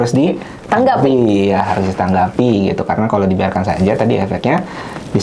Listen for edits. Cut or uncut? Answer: uncut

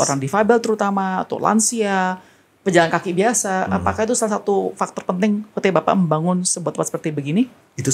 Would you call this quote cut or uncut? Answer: uncut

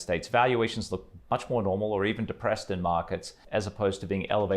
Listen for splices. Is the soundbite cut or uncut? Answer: cut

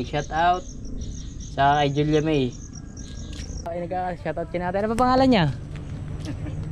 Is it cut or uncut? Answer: cut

